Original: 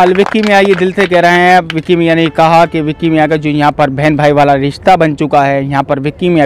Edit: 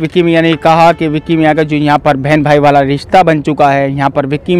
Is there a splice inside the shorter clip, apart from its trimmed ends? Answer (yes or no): no